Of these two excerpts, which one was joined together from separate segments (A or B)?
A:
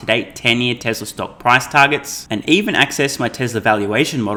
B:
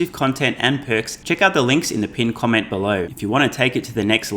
B